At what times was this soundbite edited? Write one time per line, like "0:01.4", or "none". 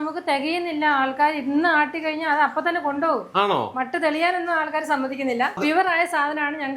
0:05.6